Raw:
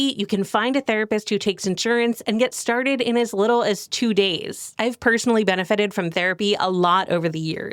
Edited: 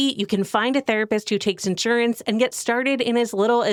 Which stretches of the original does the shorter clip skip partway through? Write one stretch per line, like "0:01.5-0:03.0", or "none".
none